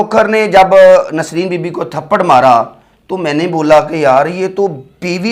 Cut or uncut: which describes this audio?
uncut